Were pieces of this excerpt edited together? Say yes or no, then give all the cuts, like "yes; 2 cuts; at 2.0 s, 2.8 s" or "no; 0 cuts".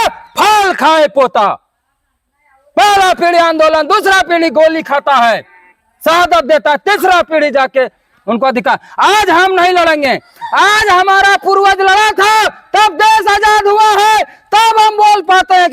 no; 0 cuts